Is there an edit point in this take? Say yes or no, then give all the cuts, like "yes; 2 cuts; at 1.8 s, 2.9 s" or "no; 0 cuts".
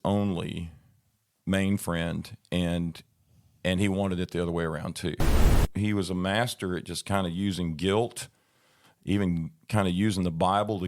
yes; 1 cut; at 5.5 s